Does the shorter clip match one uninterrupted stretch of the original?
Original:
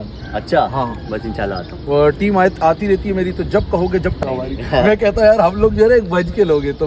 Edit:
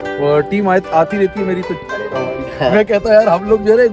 no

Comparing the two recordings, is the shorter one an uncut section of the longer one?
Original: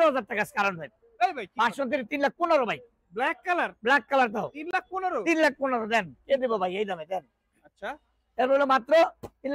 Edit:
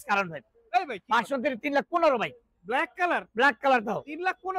yes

